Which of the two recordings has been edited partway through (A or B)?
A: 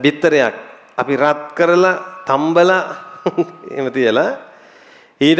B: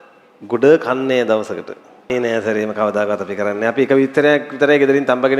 B